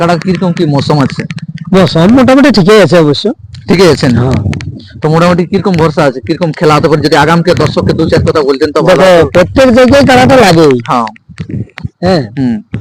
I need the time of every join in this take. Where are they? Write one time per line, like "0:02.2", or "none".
none